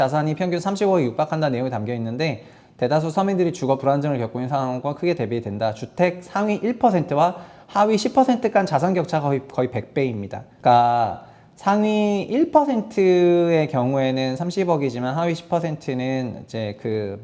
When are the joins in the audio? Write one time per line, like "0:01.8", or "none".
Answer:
none

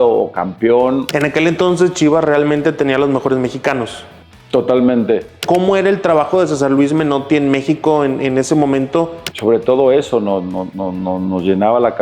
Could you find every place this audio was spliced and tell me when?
0:01.1
0:05.4
0:09.2

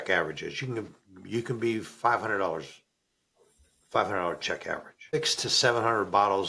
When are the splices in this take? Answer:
0:05.1

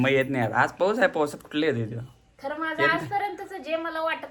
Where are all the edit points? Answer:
none

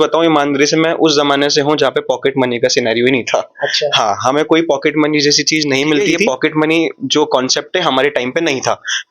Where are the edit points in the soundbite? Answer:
0:06.2

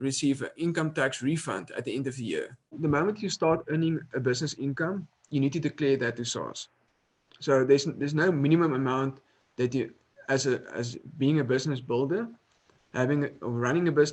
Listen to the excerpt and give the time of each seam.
0:02.8

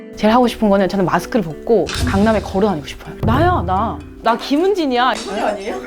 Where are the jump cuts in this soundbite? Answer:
0:03.1
0:05.2

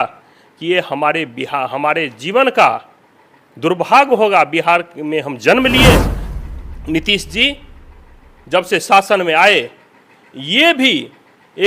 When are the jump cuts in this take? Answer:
0:06.4

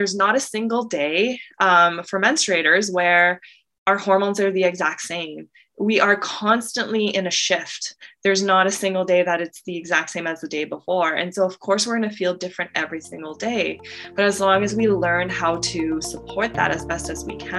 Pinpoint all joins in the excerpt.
none

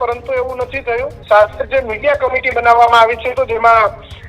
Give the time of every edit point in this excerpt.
0:01.1

